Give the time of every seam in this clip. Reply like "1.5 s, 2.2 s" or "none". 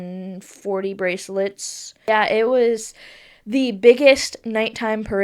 2.1 s